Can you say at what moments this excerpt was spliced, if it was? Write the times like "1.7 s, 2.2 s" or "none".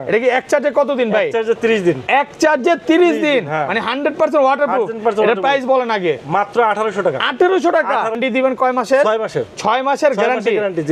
8.2 s